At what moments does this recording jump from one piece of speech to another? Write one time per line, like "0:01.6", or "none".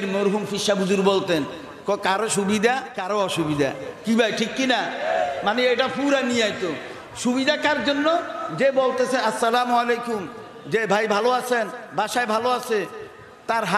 0:02.9